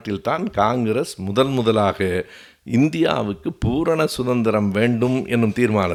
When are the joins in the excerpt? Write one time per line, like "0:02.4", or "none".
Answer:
none